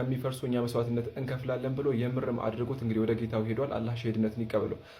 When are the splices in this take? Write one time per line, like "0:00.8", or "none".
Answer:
none